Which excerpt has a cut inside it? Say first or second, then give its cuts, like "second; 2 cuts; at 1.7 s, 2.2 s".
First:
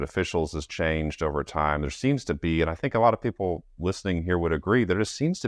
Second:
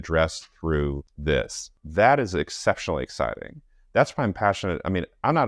second; 2 cuts; at 1.1 s, 1.8 s